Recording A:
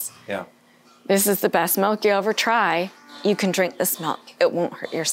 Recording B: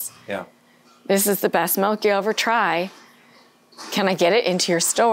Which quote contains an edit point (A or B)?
A